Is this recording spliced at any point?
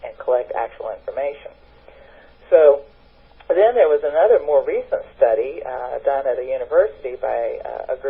yes; 1 cut; at 5.1 s

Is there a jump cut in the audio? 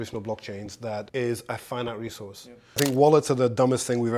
yes; 2 cuts; at 1.1 s, 2.8 s

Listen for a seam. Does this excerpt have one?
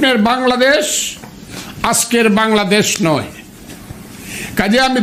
no; 0 cuts

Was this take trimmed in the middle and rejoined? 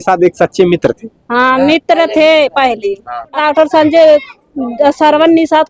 yes; 1 cut; at 3.3 s

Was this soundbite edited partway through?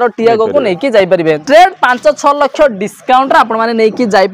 yes; 1 cut; at 1.4 s

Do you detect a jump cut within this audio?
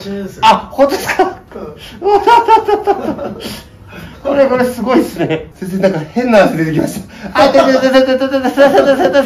yes; 1 cut; at 5.5 s

